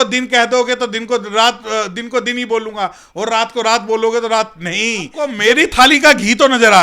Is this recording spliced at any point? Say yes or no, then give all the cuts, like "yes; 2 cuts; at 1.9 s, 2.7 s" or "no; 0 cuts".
yes; 1 cut; at 5.3 s